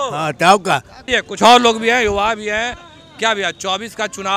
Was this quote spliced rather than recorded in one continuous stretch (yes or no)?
no